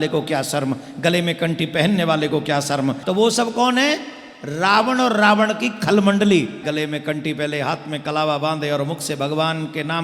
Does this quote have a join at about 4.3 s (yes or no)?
no